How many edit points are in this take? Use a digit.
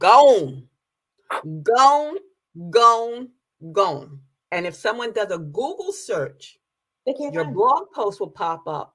1